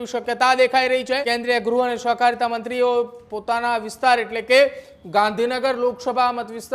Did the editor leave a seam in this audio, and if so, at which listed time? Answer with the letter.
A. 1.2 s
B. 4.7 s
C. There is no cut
A